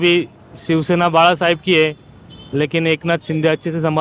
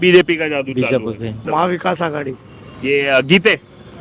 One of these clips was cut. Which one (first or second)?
second